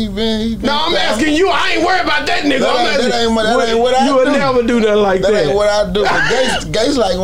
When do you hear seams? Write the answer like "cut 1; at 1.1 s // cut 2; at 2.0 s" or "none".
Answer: none